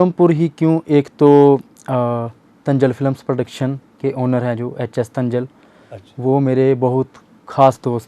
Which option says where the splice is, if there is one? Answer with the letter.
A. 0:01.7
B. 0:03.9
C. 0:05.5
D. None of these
D